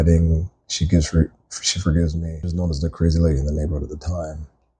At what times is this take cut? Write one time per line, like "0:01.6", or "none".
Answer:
0:02.6